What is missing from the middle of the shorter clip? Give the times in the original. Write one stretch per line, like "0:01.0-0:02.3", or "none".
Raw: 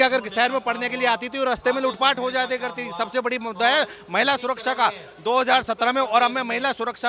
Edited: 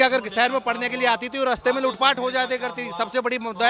none